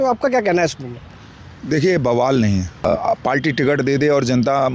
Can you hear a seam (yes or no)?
yes